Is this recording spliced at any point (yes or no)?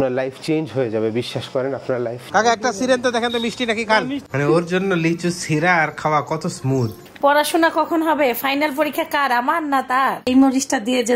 yes